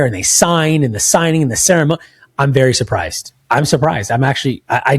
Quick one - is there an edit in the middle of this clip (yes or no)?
no